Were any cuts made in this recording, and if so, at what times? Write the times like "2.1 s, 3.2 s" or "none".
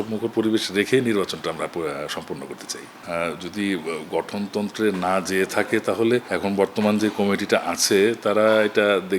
none